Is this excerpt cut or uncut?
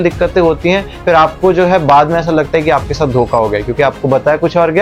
uncut